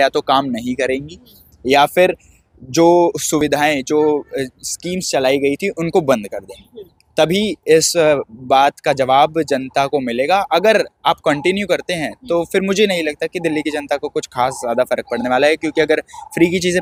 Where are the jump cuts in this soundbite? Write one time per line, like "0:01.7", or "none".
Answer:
none